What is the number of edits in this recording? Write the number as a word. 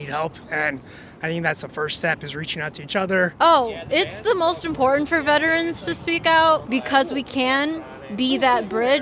two